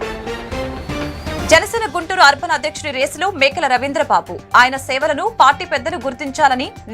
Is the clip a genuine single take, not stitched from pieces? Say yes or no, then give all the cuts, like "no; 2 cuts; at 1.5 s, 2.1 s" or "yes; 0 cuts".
no; 1 cut; at 1.4 s